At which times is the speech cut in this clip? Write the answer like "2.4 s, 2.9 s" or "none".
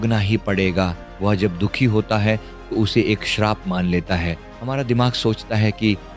1.0 s, 4.4 s

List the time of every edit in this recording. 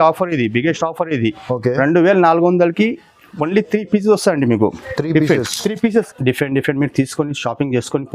6.1 s

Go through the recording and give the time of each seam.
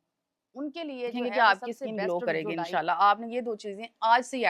1.1 s

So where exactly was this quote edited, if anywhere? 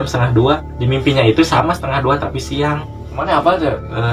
3.1 s

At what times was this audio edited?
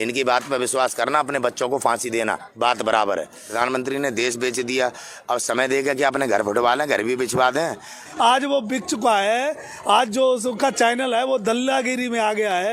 3.4 s, 8.0 s

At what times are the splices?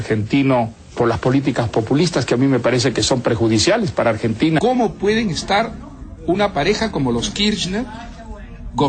4.6 s

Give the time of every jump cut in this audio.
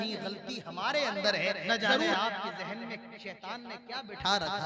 2.1 s

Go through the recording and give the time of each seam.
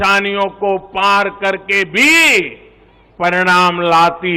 none

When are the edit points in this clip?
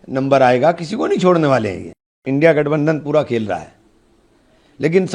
2.2 s

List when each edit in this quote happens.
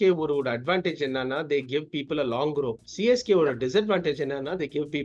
none

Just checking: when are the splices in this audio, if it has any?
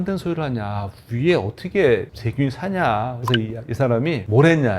3.1 s

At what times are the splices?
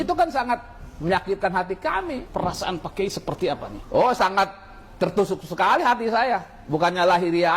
2.3 s

